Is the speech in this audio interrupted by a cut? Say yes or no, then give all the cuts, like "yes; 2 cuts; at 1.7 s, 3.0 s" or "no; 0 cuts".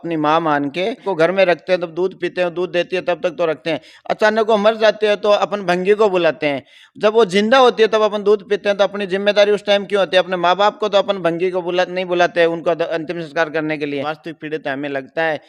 yes; 2 cuts; at 1.0 s, 14.1 s